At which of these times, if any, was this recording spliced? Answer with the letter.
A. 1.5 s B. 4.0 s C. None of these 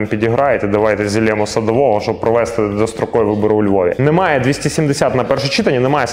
B